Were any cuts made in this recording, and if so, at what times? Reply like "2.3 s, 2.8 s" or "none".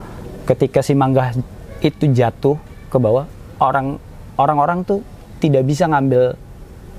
none